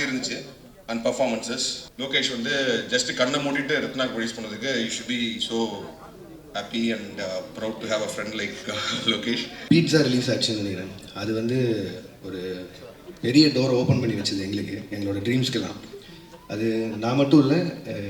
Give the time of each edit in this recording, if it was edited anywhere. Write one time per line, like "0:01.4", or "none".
0:01.8
0:09.5